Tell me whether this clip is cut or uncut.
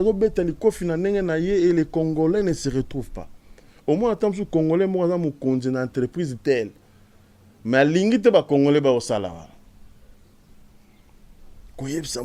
uncut